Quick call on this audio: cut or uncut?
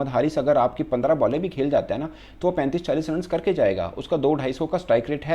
uncut